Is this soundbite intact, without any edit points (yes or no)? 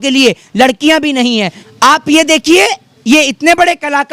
no